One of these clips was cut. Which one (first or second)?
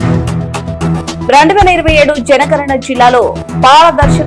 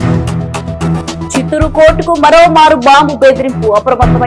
first